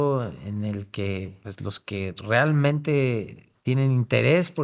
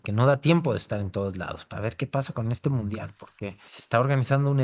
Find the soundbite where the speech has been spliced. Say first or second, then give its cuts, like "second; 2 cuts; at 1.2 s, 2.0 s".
second; 2 cuts; at 1.7 s, 3.7 s